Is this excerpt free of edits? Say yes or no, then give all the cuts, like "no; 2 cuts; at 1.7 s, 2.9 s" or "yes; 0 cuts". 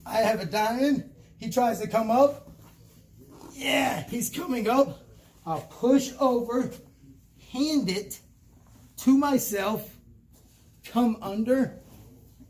yes; 0 cuts